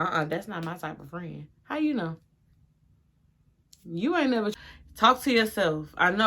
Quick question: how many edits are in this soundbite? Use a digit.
1